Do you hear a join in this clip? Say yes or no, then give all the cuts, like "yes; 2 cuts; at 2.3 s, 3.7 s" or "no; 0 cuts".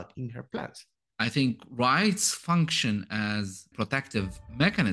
yes; 2 cuts; at 1.0 s, 3.7 s